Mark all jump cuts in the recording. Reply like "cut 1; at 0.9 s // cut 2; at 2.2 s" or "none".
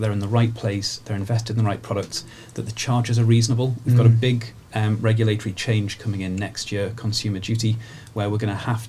none